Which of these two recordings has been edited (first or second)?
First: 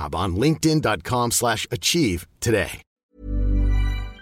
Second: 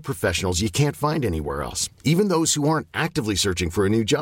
first